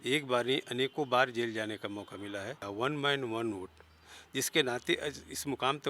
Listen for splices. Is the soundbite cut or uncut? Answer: cut